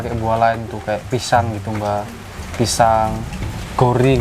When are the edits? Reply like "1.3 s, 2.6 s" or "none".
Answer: none

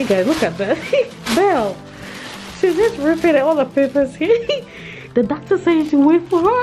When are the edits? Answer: none

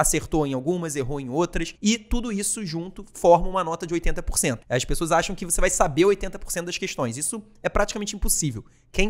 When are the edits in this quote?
1.7 s, 4.6 s

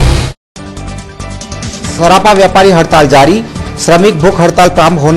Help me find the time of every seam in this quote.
1.2 s

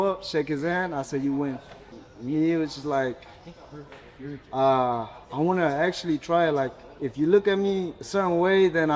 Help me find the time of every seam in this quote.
none

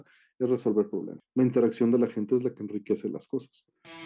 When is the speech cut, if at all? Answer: 1.2 s

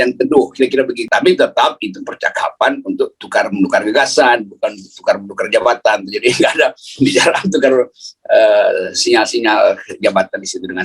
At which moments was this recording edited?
1.0 s

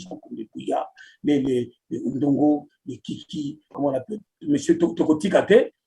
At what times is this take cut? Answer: 3.7 s

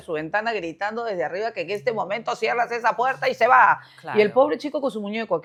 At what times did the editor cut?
none

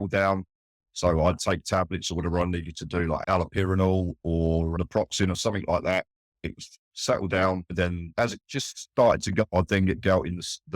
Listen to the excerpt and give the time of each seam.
3.2 s, 4.7 s, 8.1 s, 9.5 s

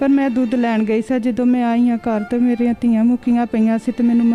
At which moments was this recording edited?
none

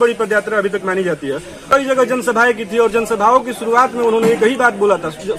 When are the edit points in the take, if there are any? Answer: 1.6 s

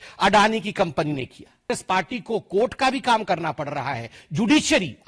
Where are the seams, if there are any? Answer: 1.8 s

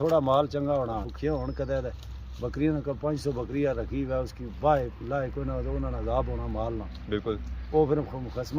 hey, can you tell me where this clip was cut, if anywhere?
1.1 s

